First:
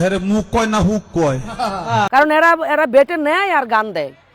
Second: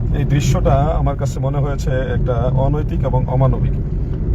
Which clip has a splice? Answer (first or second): first